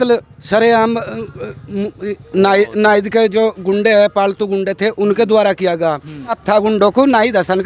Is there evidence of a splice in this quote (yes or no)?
yes